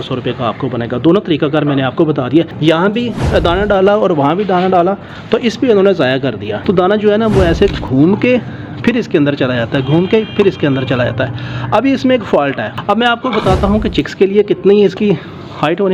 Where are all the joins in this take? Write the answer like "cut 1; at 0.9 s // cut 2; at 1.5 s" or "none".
cut 1; at 2.5 s // cut 2; at 6.5 s // cut 3; at 12.7 s